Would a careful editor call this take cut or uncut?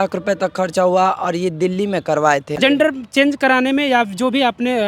cut